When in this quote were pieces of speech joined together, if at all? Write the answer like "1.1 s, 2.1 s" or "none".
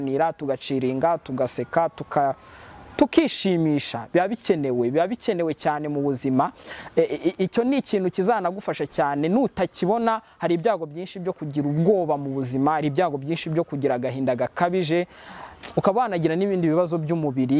none